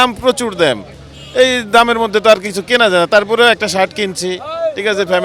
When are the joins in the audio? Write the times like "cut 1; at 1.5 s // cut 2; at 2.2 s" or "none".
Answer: none